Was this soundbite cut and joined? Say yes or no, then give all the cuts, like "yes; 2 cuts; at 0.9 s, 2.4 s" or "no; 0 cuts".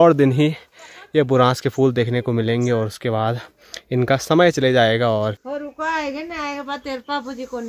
yes; 1 cut; at 5.4 s